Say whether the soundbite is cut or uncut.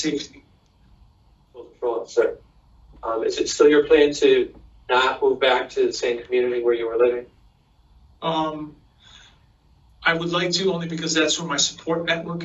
cut